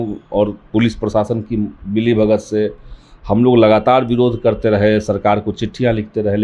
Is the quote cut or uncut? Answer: uncut